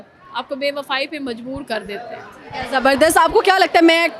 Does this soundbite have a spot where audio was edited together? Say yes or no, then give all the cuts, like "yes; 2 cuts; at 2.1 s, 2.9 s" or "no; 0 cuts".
no; 0 cuts